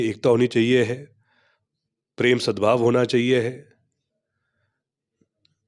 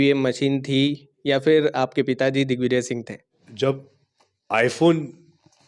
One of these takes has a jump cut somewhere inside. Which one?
second; 1 cut; at 3.4 s

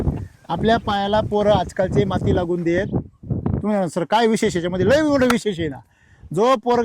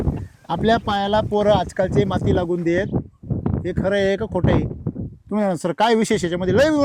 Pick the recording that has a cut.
first; 1 cut; at 3.5 s

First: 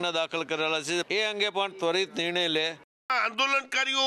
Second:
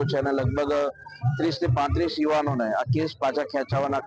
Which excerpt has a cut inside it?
first; 2 cuts; at 1.1 s, 3.1 s

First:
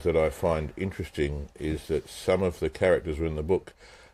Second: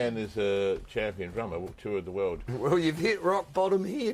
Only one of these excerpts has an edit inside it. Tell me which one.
second; 1 cut; at 2.5 s

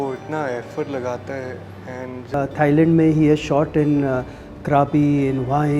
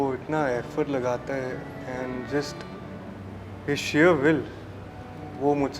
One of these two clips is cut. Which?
first; 1 cut; at 2.3 s

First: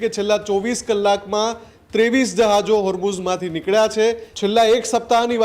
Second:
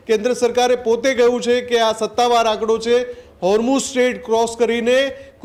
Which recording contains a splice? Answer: first; 1 cut; at 4.3 s

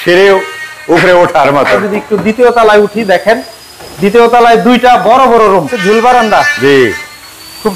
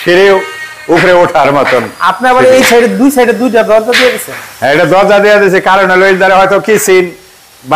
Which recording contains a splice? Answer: first; 2 cuts; at 1.8 s, 5.7 s

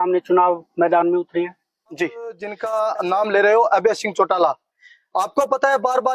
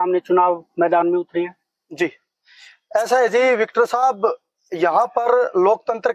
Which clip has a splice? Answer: first; 1 cut; at 2.5 s

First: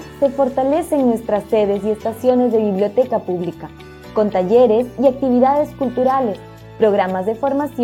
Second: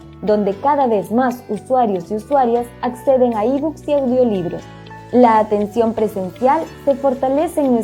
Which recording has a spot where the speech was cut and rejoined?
second; 1 cut; at 5.6 s

